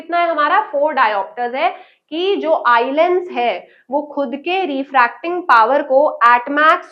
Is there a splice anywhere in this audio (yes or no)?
no